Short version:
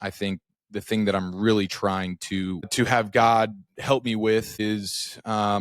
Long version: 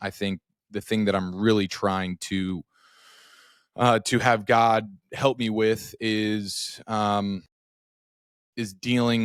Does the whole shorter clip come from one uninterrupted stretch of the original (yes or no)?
no